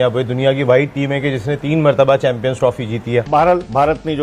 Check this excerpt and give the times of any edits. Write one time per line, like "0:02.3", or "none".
0:03.3